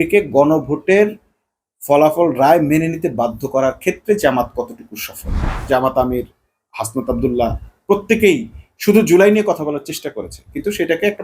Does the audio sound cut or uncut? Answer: cut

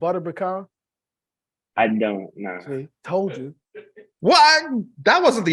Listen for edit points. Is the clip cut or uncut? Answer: uncut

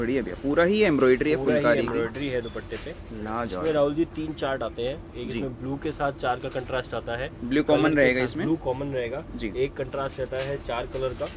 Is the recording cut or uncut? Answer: uncut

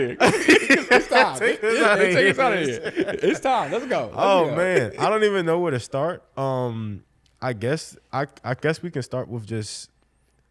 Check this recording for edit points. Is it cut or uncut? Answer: uncut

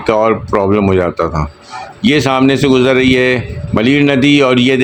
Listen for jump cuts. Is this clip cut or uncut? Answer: uncut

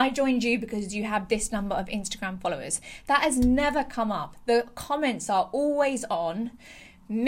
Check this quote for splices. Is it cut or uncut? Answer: uncut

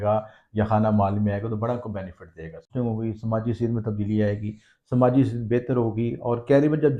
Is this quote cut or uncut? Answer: cut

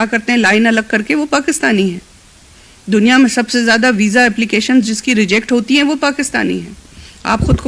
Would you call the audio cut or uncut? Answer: uncut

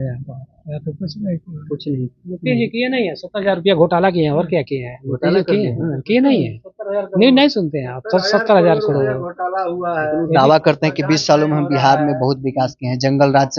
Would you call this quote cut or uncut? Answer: uncut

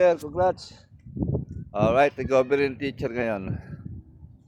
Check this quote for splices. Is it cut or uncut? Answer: uncut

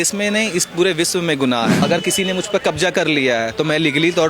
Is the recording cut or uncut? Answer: cut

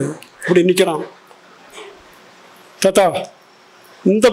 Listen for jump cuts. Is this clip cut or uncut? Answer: uncut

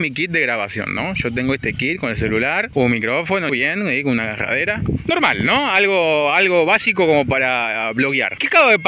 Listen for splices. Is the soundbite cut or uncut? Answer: uncut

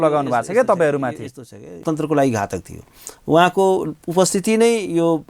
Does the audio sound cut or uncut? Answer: cut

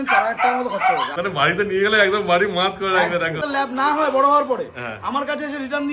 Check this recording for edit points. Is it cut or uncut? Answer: cut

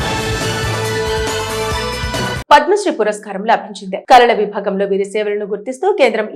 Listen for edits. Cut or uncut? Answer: uncut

